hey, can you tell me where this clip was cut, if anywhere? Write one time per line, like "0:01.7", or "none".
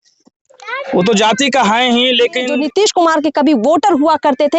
0:02.5